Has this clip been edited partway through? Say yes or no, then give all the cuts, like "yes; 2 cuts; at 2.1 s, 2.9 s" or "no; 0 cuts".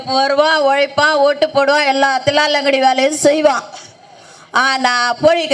no; 0 cuts